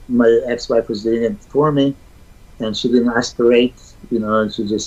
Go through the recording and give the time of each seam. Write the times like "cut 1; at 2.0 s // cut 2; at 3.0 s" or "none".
none